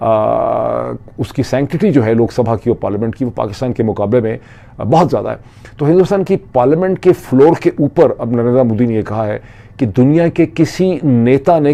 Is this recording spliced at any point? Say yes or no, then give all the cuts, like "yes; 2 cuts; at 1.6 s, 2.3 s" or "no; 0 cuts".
no; 0 cuts